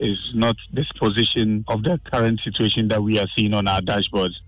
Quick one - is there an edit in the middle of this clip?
yes; 1 cut; at 1.6 s

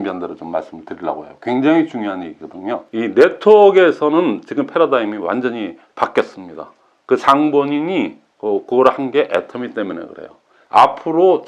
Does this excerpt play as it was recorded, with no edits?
no; 2 cuts; at 2.9 s, 10.5 s

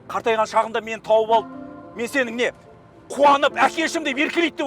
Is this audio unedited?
yes; 0 cuts

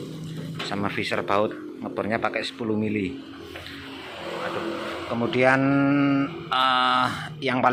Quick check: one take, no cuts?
yes; 0 cuts

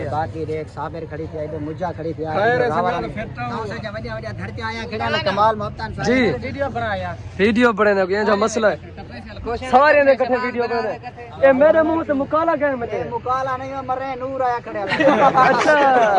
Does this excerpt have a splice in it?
no; 0 cuts

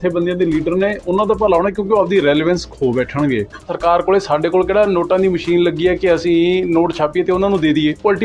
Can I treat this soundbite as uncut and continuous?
no; 1 cut; at 3.7 s

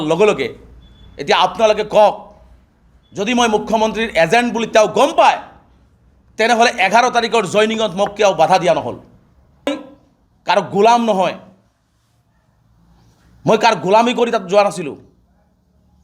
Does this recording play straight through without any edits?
no; 1 cut; at 9.7 s

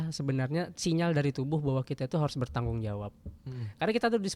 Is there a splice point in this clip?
no; 0 cuts

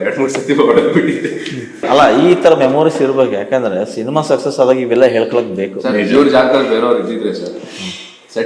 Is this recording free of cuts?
no; 1 cut; at 1.8 s

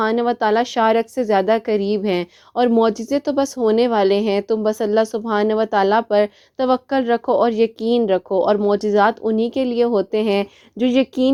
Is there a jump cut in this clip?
no; 0 cuts

